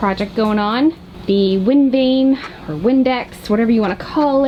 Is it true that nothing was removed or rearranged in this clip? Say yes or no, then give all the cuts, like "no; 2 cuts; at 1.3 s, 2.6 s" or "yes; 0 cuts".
yes; 0 cuts